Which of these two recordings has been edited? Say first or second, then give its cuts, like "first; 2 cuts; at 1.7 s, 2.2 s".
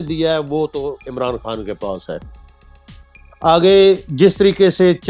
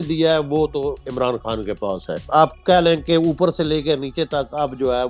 second; 1 cut; at 2.2 s